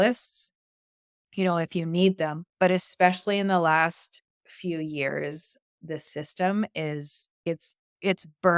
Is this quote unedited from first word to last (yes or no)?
no